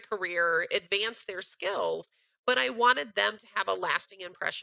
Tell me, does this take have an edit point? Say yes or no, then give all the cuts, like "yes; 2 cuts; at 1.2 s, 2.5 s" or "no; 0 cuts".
no; 0 cuts